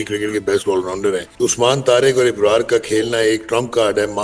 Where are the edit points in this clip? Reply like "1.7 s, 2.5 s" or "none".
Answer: 1.3 s